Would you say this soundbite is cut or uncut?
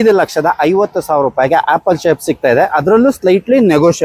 uncut